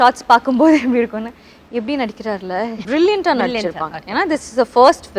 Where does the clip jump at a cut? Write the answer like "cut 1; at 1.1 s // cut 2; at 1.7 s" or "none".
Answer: cut 1; at 2.8 s